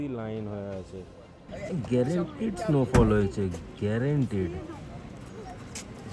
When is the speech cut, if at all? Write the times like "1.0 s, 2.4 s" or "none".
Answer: 1.5 s